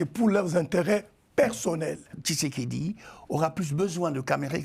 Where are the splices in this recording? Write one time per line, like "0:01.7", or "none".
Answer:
0:02.2